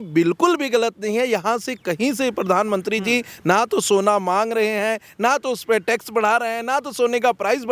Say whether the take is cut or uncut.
uncut